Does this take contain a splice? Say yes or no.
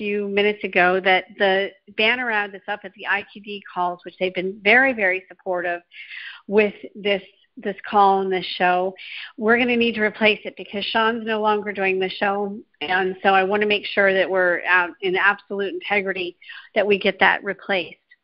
no